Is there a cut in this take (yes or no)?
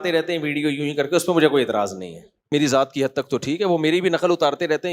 yes